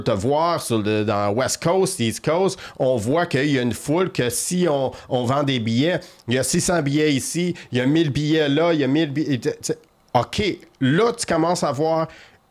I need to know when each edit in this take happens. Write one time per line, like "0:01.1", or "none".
none